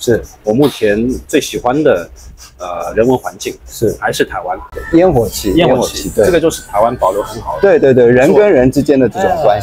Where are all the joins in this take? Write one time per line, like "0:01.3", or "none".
0:04.7